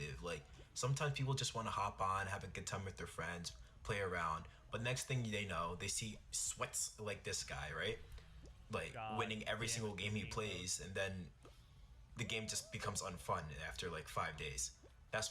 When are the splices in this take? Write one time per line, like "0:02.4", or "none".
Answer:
0:03.6
0:08.0